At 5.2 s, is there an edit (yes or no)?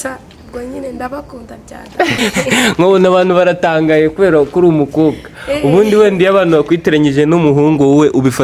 no